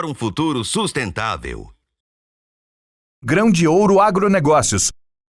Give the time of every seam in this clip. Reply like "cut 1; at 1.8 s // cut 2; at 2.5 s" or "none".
cut 1; at 2.5 s